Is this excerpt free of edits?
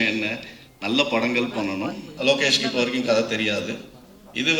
no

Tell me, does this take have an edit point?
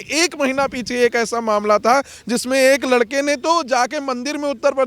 no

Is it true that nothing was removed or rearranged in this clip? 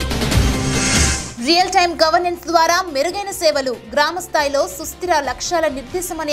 yes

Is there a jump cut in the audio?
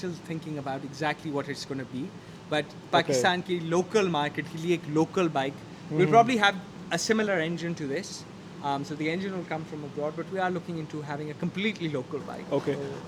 no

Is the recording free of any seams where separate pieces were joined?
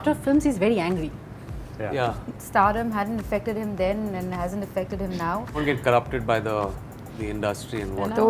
no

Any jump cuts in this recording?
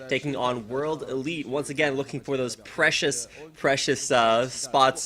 no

